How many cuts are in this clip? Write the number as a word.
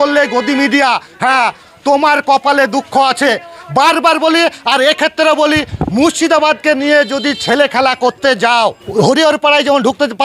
zero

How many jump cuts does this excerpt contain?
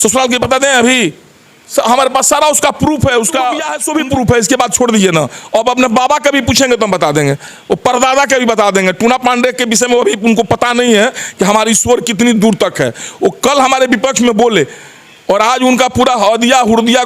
one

